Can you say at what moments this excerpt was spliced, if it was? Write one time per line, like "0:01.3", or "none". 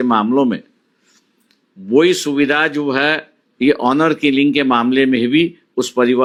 none